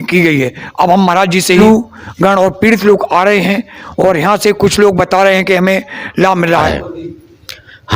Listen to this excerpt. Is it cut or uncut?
cut